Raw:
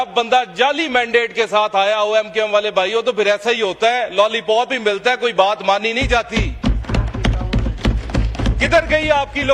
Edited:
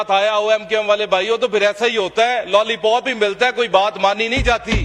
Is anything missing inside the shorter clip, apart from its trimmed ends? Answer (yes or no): no